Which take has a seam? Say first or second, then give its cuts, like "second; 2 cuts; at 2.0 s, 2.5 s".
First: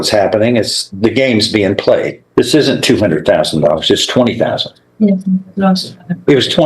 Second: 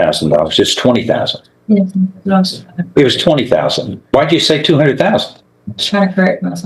first; 1 cut; at 2.2 s